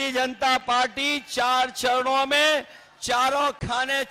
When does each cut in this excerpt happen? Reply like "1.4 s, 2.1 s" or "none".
none